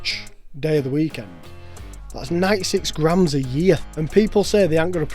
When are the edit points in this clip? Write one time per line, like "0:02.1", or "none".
0:03.9